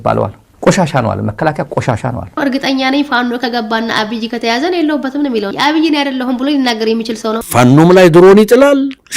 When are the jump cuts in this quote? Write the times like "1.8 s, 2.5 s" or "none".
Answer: 2.3 s, 5.5 s, 7.4 s